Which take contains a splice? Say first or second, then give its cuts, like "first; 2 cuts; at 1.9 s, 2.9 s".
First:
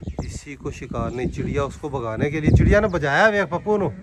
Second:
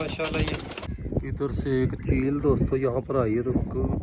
second; 1 cut; at 0.9 s